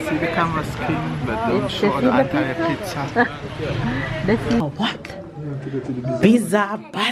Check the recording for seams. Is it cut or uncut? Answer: cut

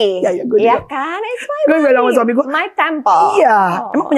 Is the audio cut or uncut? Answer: uncut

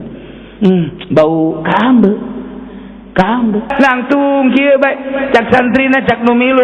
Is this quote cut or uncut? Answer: cut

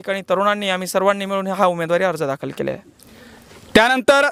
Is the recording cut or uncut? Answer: uncut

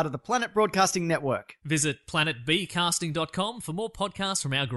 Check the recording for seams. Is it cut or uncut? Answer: uncut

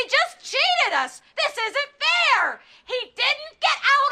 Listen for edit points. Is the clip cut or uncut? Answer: cut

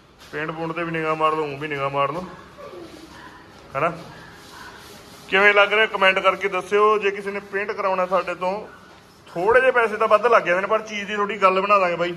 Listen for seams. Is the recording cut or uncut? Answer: uncut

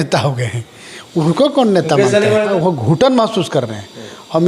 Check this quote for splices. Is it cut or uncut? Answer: cut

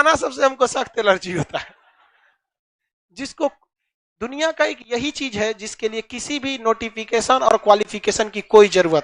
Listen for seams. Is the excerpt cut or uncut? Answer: uncut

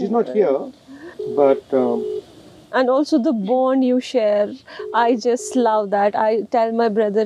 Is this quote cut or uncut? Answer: uncut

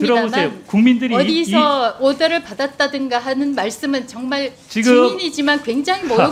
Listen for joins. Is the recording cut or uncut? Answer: uncut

